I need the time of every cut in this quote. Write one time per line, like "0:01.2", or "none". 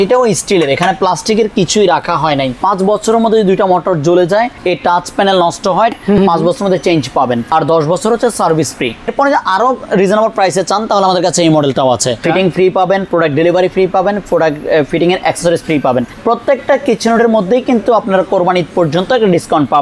0:02.6
0:04.6
0:05.9
0:07.5
0:09.1
0:12.2
0:16.1